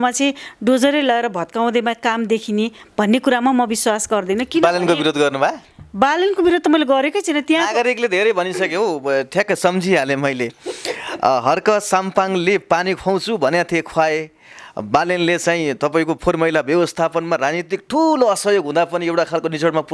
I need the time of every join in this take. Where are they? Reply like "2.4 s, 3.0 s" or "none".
none